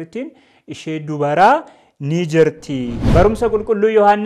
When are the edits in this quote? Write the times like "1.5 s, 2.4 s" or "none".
3.1 s